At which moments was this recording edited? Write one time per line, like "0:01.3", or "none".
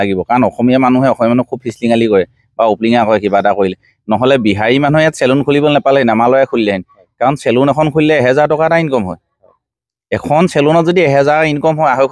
none